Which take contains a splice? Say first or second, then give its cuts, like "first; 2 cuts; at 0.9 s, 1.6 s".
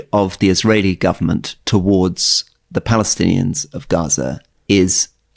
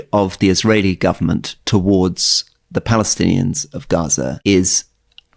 second; 1 cut; at 4.4 s